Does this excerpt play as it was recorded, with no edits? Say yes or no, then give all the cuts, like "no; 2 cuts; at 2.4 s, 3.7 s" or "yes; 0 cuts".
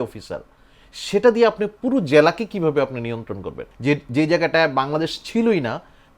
no; 1 cut; at 3.7 s